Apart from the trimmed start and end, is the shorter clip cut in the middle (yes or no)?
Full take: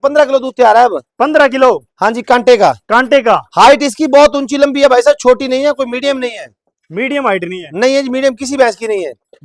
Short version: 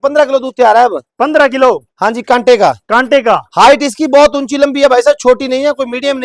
no